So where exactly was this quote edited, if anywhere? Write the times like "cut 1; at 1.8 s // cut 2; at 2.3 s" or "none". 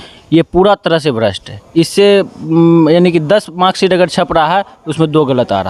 none